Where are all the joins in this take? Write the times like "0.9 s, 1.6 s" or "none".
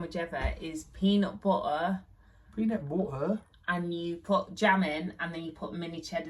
none